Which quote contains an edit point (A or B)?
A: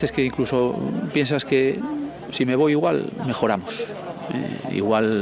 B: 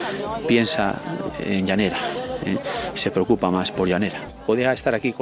B